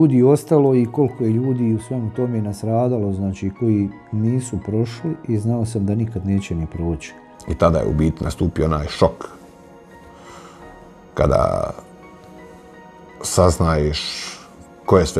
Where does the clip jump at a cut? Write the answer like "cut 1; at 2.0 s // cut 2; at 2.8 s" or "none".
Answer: none